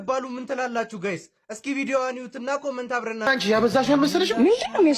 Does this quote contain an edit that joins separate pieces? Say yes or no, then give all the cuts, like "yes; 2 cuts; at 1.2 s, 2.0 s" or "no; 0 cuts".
no; 0 cuts